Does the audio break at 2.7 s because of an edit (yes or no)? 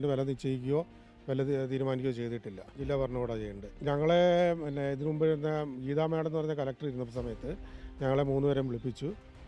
yes